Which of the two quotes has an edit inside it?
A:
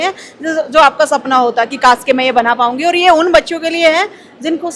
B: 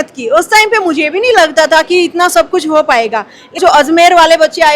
B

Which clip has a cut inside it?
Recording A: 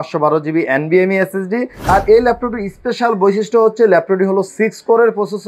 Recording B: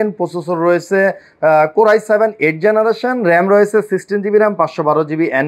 A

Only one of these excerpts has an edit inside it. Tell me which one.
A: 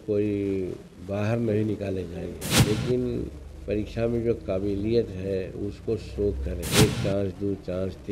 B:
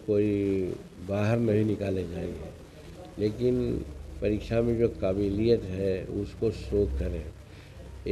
A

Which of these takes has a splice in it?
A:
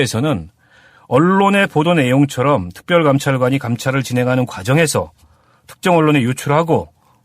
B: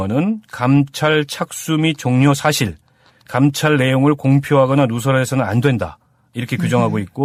A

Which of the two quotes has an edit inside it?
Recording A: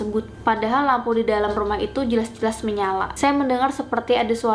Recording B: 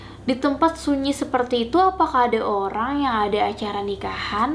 A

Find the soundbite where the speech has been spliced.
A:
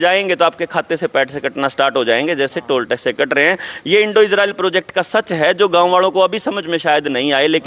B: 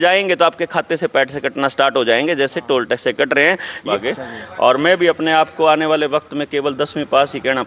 B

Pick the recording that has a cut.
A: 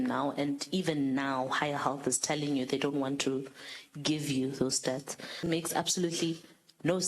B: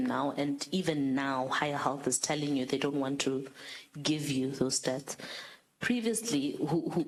A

